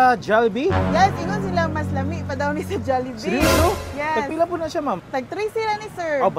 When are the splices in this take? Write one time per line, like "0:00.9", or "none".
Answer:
0:05.0